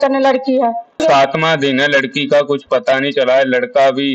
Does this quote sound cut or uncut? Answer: cut